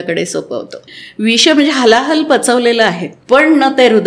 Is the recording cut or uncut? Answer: cut